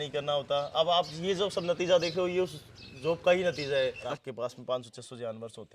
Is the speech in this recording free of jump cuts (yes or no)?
no